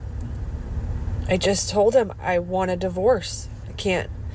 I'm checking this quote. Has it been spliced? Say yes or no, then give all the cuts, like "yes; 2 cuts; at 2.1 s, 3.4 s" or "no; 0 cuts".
no; 0 cuts